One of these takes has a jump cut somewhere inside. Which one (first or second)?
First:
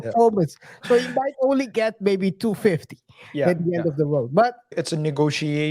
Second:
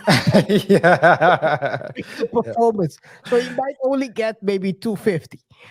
first